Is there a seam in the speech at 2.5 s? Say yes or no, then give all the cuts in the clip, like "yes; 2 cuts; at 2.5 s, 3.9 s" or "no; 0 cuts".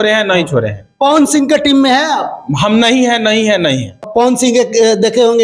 no; 1 cut; at 4.0 s